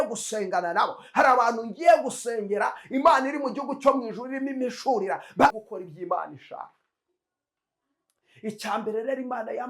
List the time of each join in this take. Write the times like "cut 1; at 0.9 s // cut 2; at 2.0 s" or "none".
cut 1; at 5.5 s